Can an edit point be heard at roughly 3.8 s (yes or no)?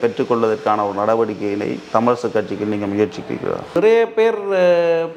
yes